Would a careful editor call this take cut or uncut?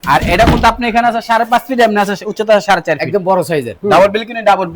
cut